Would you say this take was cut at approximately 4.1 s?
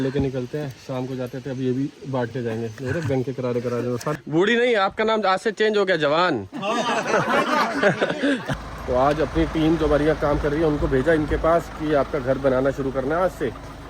yes; 2 cuts; at 4.1 s, 8.5 s

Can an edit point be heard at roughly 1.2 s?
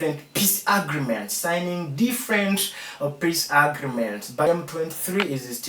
no; 1 cut; at 4.5 s

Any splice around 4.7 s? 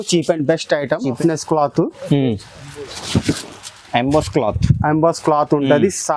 no; 1 cut; at 1.2 s

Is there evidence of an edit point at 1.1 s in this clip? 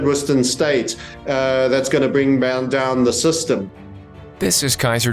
no; 1 cut; at 3.8 s

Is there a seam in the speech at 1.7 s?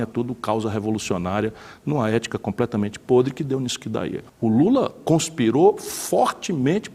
no; 1 cut; at 4.2 s

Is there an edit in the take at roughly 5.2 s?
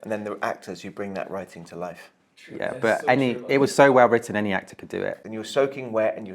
yes; 1 cut; at 5.2 s

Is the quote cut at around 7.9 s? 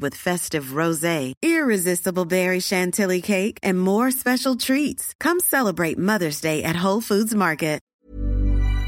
yes; 1 cut; at 7.9 s

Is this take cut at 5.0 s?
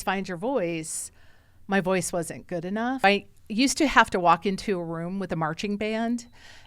no; 1 cut; at 3.0 s

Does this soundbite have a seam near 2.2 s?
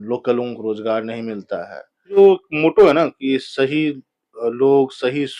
yes; 1 cut; at 2.2 s

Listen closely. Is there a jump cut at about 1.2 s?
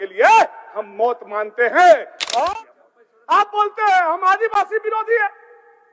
no; 1 cut; at 2.4 s

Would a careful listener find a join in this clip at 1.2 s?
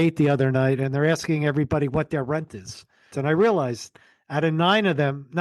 no; 1 cut; at 3.1 s

